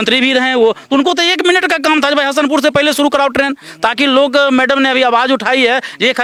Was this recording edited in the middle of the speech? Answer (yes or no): no